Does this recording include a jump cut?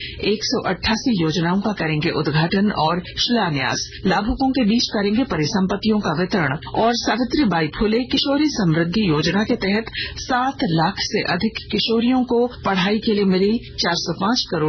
yes; 4 cuts; at 3.4 s, 6.6 s, 12.6 s, 13.7 s

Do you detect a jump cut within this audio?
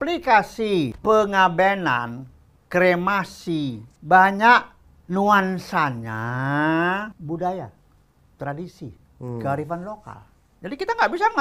yes; 3 cuts; at 0.9 s, 3.9 s, 7.2 s

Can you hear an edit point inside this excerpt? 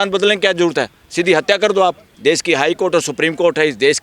yes; 1 cut; at 2.1 s

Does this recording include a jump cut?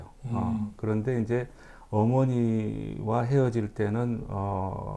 no; 0 cuts

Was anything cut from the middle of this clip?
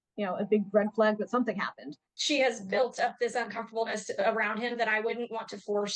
yes; 1 cut; at 2.1 s

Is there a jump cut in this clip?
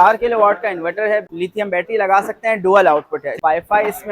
yes; 2 cuts; at 1.4 s, 3.4 s

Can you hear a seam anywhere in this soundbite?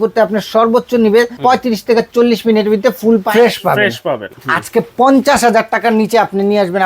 yes; 3 cuts; at 1.3 s, 3.3 s, 4.3 s

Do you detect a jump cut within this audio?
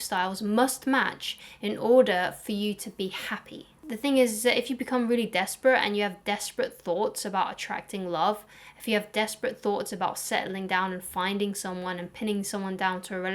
yes; 1 cut; at 3.7 s

